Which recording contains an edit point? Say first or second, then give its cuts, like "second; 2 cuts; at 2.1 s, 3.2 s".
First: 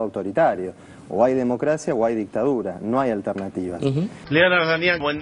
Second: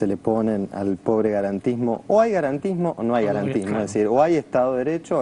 first; 1 cut; at 4.2 s